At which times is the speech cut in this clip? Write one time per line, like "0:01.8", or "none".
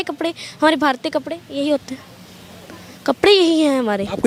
none

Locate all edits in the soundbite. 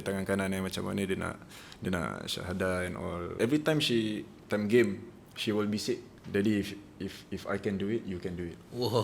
0:03.3
0:06.1

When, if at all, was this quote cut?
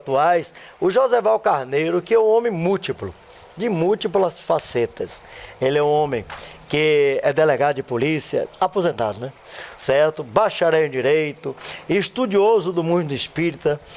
0:12.3

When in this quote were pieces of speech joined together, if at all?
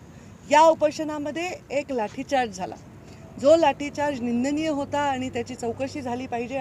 none

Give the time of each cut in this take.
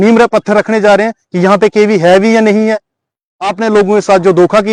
none

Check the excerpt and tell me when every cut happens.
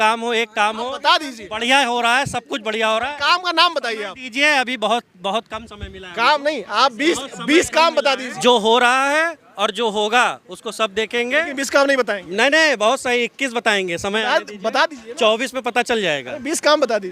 0:08.3

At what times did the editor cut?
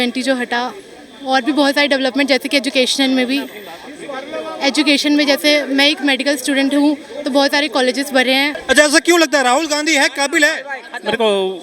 0:08.6

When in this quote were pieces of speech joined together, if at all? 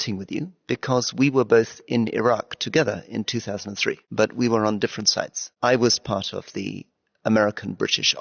0:04.0
0:05.5

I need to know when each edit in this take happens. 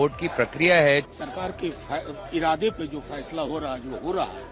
0:01.1

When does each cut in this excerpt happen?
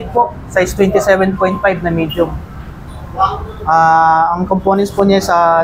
none

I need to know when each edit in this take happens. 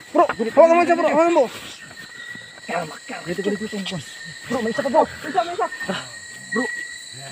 0:06.0

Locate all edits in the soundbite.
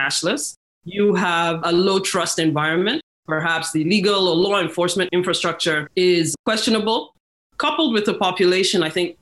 0:03.1
0:05.4
0:07.2

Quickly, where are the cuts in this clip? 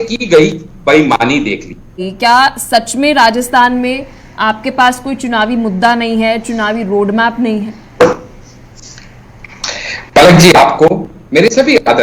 0:02.0

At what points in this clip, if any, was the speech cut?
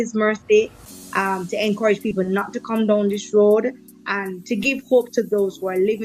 none

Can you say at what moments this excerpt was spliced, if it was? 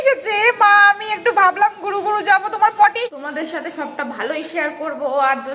0:03.0

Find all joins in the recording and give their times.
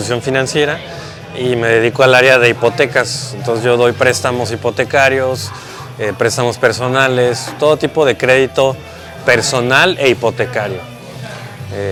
none

